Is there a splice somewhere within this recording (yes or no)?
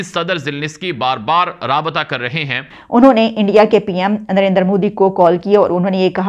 yes